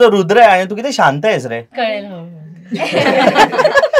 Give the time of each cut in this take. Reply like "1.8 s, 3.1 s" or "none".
1.7 s